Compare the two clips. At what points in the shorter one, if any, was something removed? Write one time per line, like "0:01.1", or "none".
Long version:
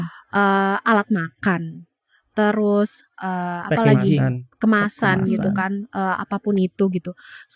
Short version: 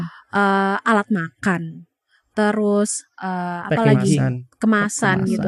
none